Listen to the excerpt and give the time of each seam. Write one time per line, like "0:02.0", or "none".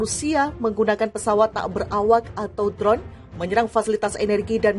none